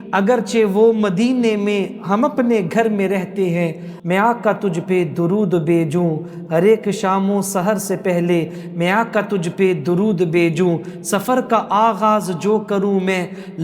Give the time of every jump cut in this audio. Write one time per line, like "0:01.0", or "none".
0:03.9